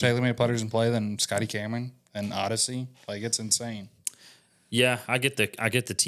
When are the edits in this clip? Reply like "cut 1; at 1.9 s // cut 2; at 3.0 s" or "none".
none